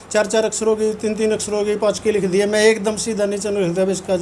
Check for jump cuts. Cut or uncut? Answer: uncut